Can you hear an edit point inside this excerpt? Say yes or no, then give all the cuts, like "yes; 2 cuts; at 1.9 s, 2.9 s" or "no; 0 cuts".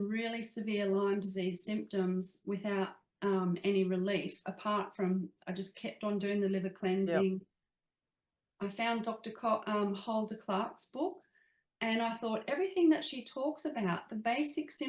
no; 0 cuts